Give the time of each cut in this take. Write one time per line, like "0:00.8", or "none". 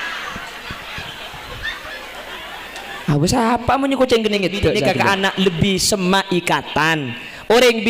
0:04.8